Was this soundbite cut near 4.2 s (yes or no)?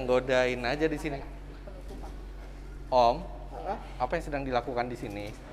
no